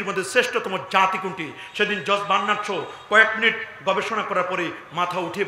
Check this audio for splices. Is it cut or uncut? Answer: uncut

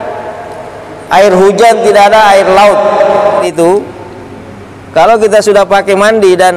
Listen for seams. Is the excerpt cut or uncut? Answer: cut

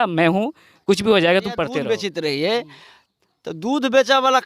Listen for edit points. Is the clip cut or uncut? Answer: cut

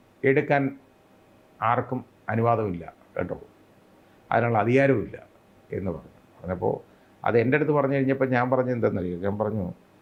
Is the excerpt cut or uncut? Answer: uncut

